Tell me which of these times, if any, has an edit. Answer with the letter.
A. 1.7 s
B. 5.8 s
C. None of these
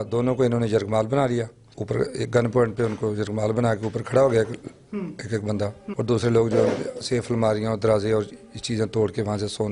B